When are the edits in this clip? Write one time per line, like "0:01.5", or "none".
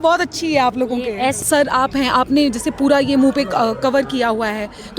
0:01.4